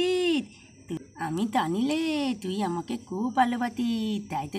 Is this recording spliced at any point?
no; 0 cuts

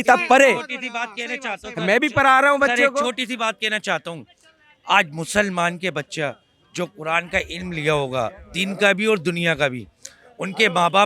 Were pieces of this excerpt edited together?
no; 0 cuts

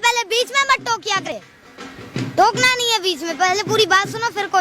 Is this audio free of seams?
no; 1 cut; at 1.3 s

